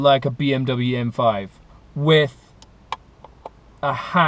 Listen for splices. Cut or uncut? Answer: uncut